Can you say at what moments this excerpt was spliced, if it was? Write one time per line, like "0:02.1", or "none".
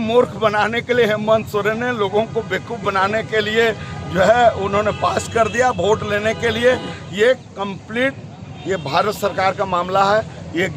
none